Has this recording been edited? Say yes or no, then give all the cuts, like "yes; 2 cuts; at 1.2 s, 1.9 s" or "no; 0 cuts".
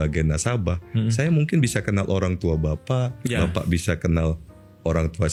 no; 0 cuts